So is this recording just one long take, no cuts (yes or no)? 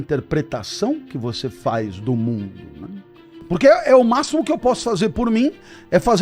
no